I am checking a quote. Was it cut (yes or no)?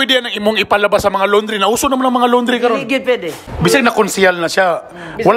yes